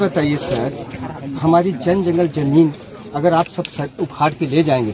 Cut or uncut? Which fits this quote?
uncut